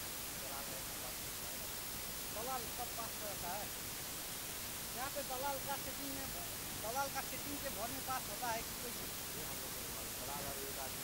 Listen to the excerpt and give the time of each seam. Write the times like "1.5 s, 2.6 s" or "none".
none